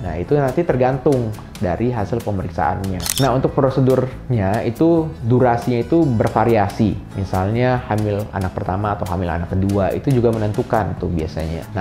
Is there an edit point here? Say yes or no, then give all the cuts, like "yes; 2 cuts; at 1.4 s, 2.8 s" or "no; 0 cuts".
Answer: yes; 1 cut; at 3.1 s